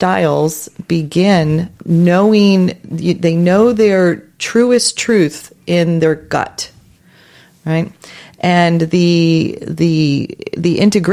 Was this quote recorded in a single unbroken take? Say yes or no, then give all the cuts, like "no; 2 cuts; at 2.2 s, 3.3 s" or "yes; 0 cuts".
no; 1 cut; at 1.7 s